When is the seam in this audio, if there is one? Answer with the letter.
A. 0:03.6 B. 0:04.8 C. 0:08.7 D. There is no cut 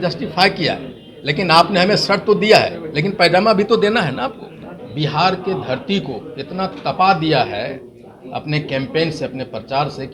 B